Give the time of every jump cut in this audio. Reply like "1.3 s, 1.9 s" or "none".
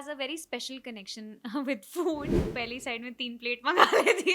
2.3 s